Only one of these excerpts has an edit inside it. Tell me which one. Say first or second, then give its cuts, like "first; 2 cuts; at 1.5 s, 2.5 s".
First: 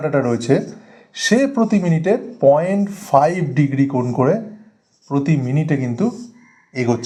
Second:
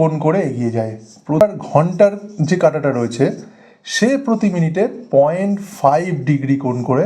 second; 1 cut; at 1.4 s